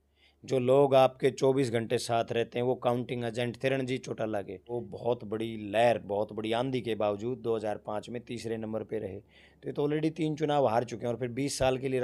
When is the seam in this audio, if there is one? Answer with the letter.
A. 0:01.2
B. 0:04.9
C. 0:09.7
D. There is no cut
B